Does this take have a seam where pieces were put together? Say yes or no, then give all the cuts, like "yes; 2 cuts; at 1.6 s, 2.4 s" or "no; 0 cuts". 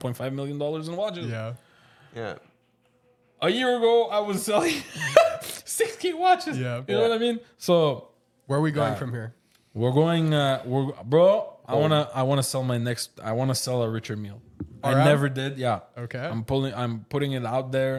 no; 0 cuts